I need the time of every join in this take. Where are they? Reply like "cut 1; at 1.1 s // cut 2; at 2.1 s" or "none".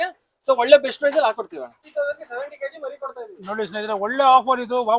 cut 1; at 1.9 s

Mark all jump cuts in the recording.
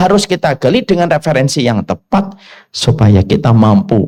none

